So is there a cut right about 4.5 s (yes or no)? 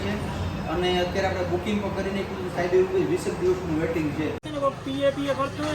yes